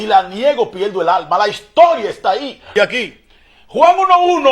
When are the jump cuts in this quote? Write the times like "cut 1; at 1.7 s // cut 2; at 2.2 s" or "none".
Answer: cut 1; at 2.6 s

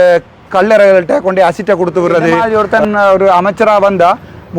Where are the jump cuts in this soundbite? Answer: cut 1; at 2.4 s

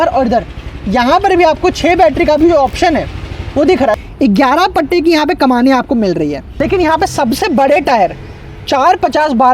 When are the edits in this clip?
cut 1; at 4.0 s // cut 2; at 6.5 s

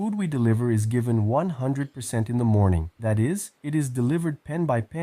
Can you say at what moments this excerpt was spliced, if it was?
cut 1; at 3.2 s

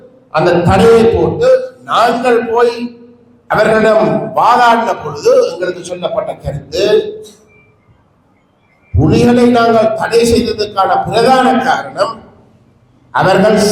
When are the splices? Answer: none

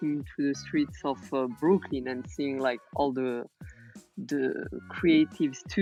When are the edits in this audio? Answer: none

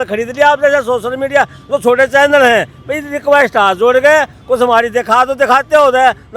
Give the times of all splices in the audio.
none

